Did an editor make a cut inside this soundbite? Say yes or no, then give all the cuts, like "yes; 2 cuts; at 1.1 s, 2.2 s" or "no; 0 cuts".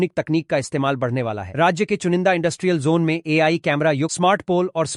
no; 0 cuts